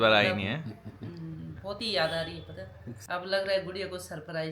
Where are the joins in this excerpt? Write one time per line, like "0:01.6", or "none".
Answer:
0:03.0